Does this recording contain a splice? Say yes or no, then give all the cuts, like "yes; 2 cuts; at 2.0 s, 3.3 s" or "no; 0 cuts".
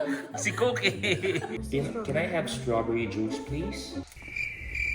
yes; 1 cut; at 1.5 s